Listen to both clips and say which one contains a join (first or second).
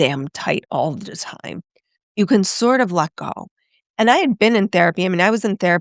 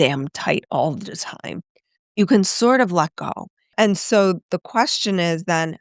second